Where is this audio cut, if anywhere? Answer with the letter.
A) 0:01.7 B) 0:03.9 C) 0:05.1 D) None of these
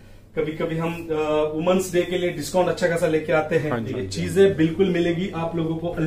B